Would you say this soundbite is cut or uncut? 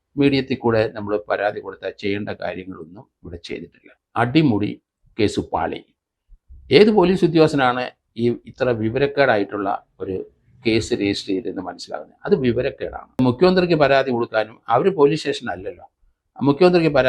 cut